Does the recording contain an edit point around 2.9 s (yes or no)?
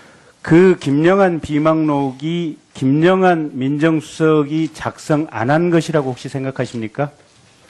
yes